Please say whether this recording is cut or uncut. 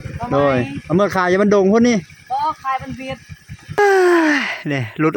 cut